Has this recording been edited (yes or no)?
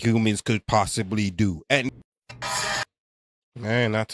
yes